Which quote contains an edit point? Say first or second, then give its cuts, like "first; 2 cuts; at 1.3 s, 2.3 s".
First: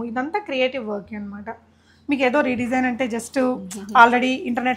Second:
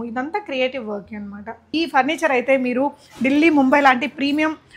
second; 1 cut; at 1.6 s